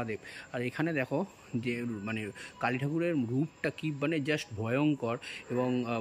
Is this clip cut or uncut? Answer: uncut